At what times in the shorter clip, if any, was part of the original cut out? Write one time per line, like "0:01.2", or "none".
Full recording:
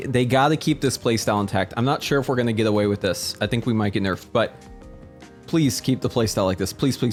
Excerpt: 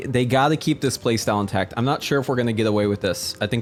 none

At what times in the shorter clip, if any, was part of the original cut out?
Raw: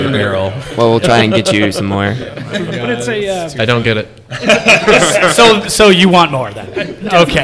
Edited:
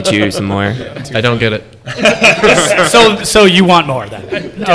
0:01.1

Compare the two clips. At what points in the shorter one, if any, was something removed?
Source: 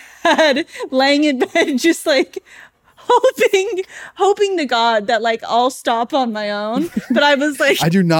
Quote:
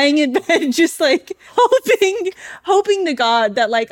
0:01.4

